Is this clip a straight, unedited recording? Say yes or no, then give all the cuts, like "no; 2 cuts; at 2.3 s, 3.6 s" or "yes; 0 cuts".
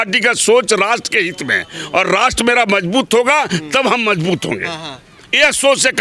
yes; 0 cuts